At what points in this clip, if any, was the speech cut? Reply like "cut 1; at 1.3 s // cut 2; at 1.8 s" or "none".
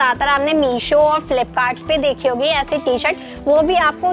none